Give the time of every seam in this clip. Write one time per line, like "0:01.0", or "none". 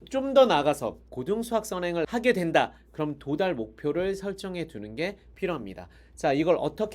0:01.0
0:02.0